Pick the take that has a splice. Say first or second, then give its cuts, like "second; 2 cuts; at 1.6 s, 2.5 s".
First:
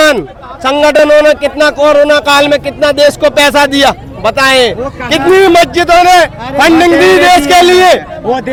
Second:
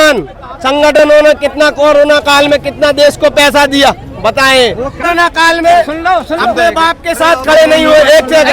second; 1 cut; at 5.0 s